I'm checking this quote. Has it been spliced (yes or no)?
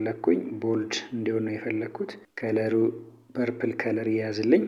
no